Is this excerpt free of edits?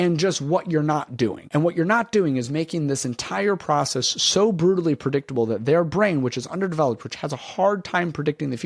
no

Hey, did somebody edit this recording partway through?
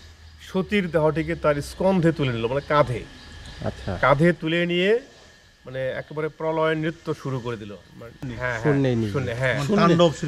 yes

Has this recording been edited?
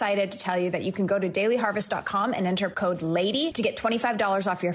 yes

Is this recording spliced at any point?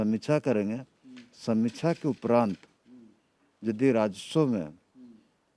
no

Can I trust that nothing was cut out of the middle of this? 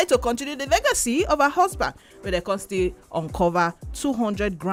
yes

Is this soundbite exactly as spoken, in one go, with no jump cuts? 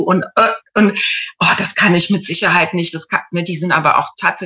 yes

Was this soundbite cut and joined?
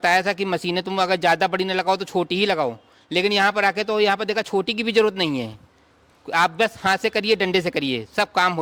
no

